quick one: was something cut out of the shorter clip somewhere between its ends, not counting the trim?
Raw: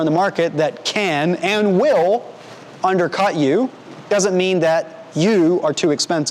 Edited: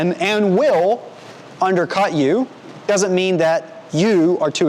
no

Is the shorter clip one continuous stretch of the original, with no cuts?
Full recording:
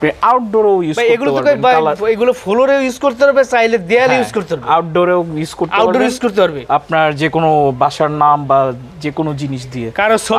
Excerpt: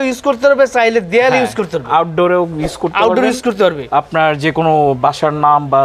yes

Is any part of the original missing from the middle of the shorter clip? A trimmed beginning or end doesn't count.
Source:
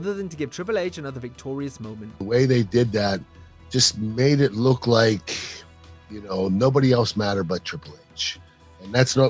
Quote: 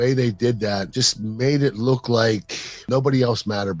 yes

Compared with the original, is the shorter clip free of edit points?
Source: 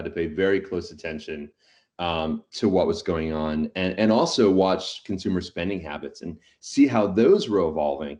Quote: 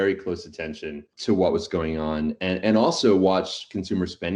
no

